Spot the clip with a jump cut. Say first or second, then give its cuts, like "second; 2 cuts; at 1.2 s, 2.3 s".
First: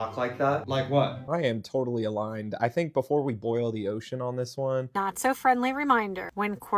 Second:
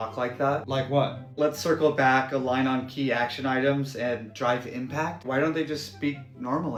first; 2 cuts; at 1.2 s, 4.9 s